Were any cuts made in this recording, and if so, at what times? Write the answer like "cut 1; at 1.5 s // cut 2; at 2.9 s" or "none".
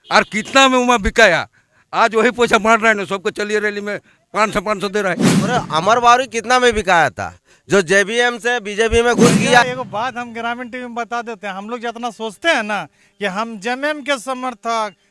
cut 1; at 5.5 s // cut 2; at 9.6 s